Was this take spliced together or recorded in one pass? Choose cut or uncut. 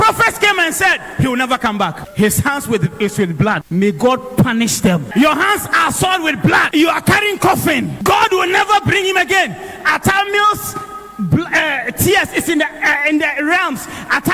cut